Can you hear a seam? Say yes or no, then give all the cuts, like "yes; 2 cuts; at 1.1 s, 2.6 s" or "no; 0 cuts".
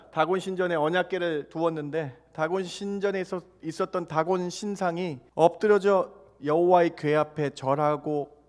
yes; 1 cut; at 5.2 s